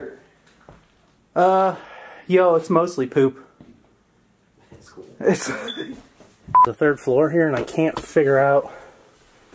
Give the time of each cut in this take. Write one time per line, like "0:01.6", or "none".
0:06.7